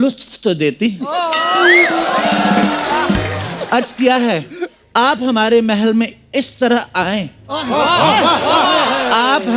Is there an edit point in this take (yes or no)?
no